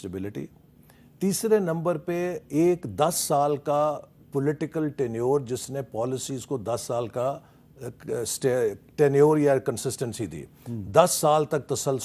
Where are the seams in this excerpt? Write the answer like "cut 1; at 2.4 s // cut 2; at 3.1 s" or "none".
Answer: none

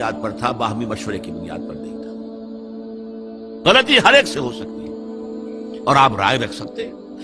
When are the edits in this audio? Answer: cut 1; at 1.3 s // cut 2; at 3.4 s

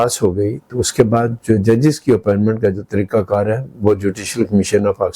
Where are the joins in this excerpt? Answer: none

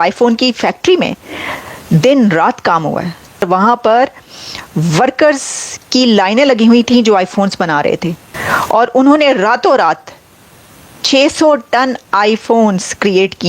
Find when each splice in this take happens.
cut 1; at 3.4 s // cut 2; at 8.3 s

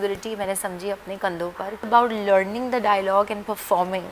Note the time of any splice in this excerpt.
cut 1; at 1.9 s

